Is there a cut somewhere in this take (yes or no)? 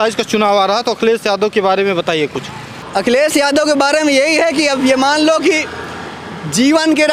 no